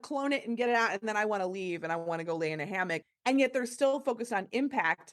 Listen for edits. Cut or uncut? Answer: cut